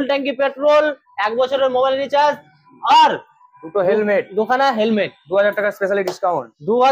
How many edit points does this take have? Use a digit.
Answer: 0